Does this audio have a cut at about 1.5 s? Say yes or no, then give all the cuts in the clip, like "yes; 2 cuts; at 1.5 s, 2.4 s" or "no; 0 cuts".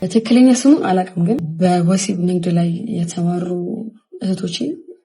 yes; 1 cut; at 1.5 s